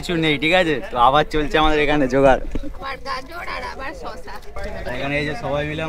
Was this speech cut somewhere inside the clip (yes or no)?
no